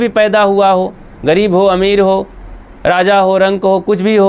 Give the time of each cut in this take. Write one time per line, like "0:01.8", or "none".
none